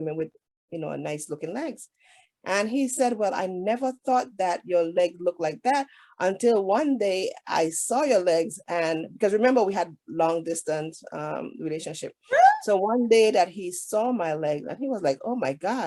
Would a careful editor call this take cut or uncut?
uncut